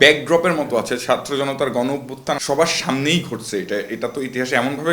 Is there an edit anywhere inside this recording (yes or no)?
yes